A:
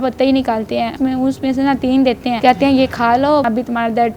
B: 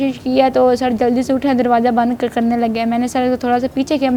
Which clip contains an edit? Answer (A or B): A